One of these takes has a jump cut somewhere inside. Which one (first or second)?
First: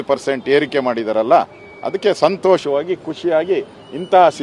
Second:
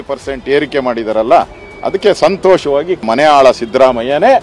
second